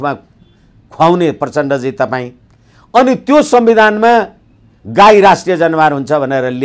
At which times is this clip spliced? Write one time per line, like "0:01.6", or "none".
none